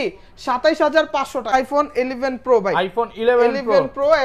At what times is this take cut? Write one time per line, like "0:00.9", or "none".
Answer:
0:01.5